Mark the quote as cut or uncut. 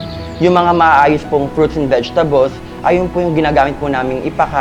uncut